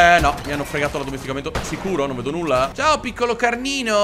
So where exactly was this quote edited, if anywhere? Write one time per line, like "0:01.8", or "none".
0:02.7